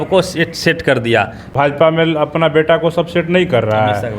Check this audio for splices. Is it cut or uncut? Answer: cut